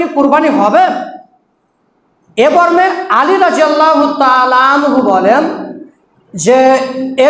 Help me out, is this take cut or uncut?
uncut